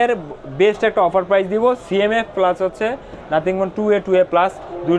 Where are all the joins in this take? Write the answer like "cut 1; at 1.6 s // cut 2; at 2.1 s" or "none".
none